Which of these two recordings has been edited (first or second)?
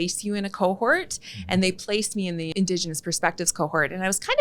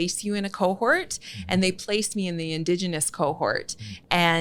first